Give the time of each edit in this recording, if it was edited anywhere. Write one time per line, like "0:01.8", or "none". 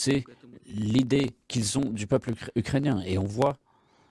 0:01.1

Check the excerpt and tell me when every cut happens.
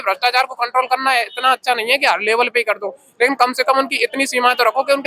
none

